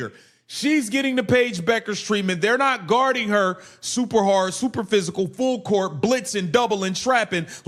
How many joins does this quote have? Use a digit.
0